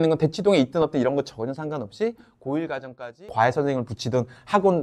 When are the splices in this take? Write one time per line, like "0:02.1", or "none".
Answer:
0:03.2